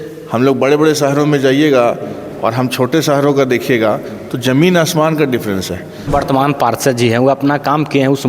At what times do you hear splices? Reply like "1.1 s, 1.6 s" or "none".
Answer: 6.1 s